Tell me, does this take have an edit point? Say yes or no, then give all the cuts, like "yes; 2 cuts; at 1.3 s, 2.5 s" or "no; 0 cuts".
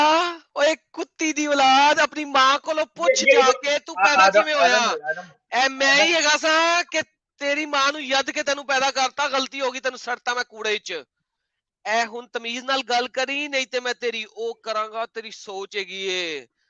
no; 0 cuts